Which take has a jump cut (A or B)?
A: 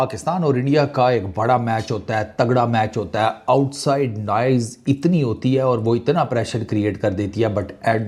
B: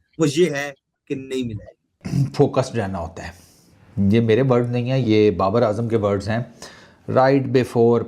B